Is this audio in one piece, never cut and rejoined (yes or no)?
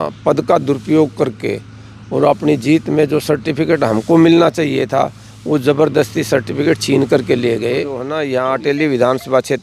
no